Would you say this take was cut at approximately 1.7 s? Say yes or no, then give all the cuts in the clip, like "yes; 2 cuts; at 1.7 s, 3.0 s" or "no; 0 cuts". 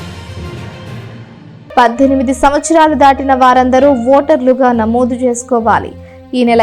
yes; 1 cut; at 1.7 s